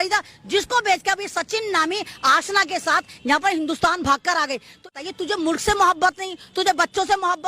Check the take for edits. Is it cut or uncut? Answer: cut